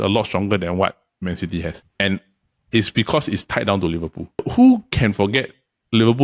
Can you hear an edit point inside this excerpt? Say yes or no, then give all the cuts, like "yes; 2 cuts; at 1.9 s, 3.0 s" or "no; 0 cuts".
yes; 1 cut; at 4.5 s